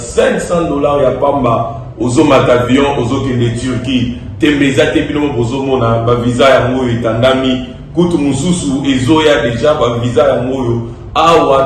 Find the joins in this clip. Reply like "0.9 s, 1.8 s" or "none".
none